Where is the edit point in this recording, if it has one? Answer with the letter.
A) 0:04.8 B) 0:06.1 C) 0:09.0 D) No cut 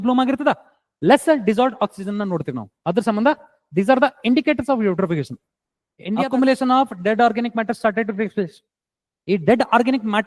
B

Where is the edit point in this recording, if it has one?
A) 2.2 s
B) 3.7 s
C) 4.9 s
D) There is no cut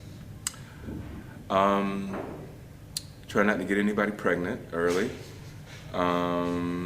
C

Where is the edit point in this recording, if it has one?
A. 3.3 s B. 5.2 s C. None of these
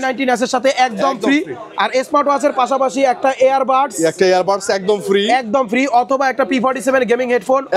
C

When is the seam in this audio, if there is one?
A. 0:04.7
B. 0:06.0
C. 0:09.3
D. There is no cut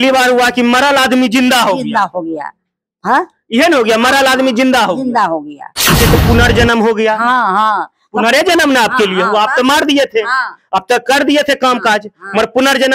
B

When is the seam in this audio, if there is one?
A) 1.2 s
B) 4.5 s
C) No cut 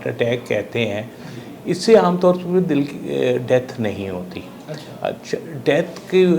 C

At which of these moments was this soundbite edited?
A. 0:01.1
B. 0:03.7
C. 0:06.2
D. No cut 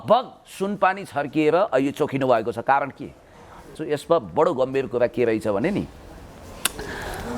D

